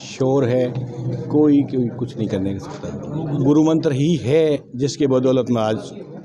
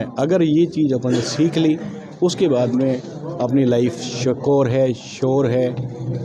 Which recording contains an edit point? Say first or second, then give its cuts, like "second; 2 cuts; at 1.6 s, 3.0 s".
first; 1 cut; at 3.4 s